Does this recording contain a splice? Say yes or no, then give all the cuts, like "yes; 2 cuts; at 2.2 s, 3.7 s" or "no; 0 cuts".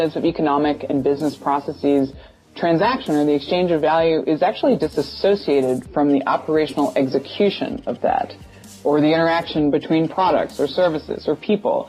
no; 0 cuts